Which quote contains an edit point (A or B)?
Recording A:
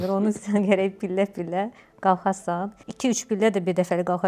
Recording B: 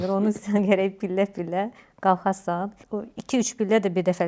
A